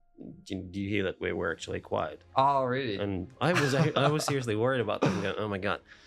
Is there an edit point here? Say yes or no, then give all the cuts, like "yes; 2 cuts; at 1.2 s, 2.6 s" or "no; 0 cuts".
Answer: no; 0 cuts